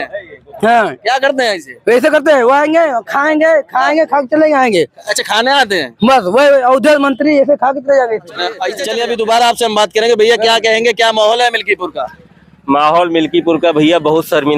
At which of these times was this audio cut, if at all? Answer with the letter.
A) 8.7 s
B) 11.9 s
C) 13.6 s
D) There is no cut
A